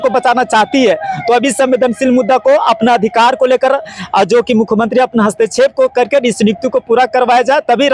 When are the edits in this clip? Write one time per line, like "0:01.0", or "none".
none